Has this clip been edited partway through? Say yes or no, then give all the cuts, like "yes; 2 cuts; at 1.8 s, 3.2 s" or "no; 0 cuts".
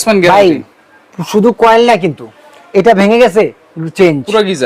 no; 0 cuts